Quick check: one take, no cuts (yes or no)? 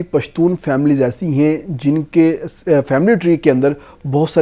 yes